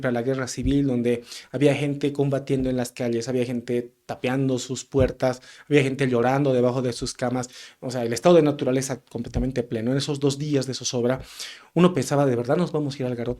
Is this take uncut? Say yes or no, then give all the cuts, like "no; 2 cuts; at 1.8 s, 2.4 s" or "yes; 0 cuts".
yes; 0 cuts